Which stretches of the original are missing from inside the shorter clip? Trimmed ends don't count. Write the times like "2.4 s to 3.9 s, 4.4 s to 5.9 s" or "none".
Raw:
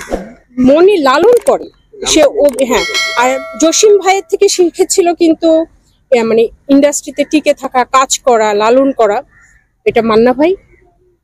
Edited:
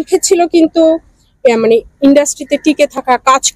none